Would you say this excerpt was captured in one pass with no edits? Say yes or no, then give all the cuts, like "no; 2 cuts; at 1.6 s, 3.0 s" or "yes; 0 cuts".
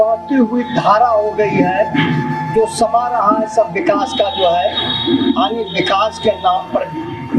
yes; 0 cuts